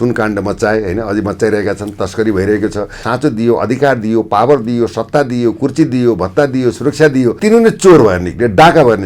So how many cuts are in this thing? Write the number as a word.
two